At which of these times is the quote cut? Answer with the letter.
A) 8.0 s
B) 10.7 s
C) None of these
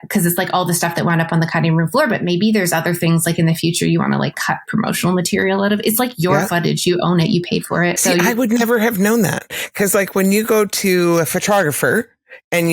A